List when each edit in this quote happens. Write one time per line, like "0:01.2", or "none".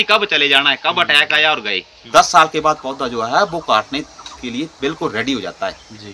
0:02.1